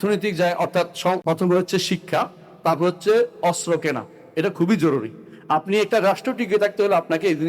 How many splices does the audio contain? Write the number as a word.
one